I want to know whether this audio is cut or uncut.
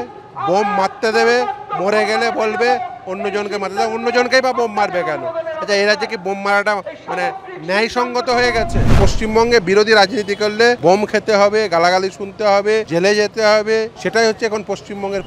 cut